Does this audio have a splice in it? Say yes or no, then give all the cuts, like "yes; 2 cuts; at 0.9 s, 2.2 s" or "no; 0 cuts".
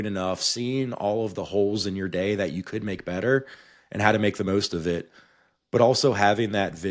no; 0 cuts